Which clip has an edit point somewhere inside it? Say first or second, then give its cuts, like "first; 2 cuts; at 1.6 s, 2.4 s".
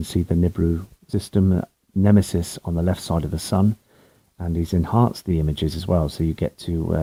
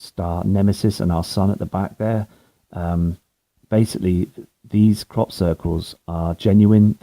second; 1 cut; at 1.1 s